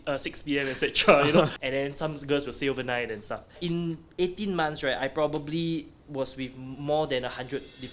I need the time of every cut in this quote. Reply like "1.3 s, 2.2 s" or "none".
1.6 s, 3.6 s